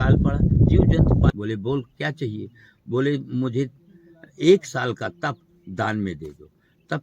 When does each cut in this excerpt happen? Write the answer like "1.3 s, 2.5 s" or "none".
1.3 s